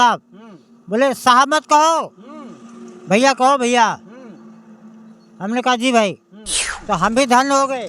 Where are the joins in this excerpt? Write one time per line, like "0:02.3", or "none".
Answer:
0:06.7